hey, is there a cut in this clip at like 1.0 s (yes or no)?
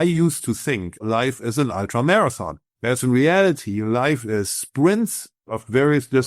yes